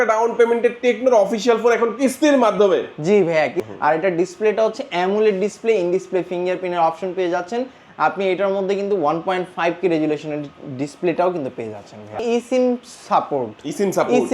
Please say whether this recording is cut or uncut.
cut